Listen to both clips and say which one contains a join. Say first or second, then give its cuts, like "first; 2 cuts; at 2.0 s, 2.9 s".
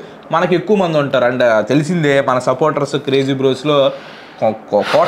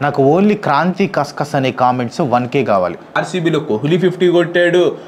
second; 1 cut; at 3.2 s